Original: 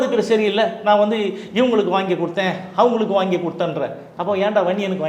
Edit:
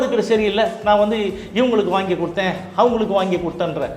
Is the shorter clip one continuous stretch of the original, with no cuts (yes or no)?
yes